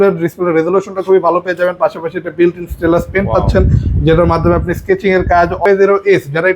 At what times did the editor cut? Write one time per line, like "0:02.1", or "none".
0:05.6